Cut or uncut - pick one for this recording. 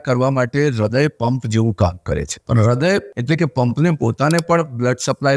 cut